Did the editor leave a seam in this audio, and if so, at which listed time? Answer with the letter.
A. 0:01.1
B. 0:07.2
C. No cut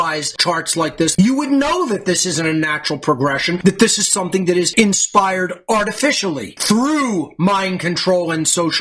A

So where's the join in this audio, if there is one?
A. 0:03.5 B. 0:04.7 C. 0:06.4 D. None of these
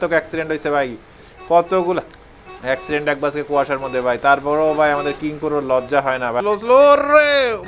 C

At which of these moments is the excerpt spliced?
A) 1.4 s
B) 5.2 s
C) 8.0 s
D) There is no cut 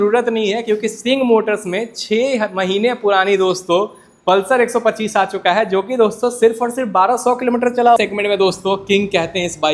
C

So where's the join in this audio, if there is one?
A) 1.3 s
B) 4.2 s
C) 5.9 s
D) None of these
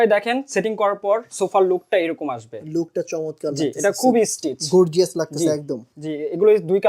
C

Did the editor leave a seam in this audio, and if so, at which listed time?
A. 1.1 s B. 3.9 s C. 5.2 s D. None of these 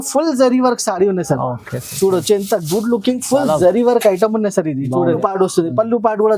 C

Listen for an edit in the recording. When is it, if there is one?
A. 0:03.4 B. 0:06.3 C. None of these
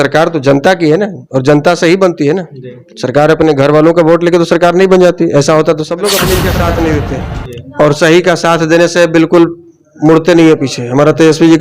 B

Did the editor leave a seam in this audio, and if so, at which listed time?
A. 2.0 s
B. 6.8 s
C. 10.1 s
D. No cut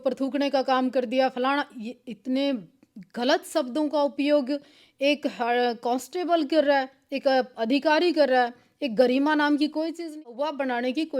C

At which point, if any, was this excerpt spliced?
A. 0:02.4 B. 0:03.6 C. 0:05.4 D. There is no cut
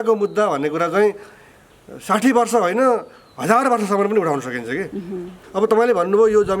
C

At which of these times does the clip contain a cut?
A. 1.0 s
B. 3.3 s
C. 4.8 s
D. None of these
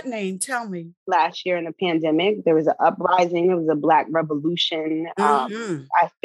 A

